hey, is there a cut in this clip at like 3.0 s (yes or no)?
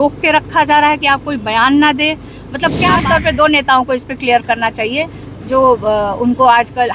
yes